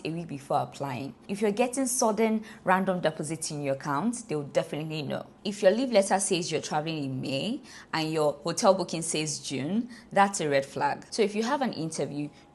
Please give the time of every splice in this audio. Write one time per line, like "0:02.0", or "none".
0:01.1
0:05.3
0:11.0